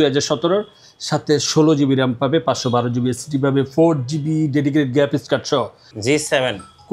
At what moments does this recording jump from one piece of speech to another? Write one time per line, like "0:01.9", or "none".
0:05.9